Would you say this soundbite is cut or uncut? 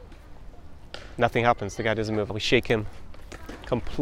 cut